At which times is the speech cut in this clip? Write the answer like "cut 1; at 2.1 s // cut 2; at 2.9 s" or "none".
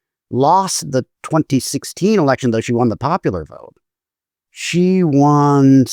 none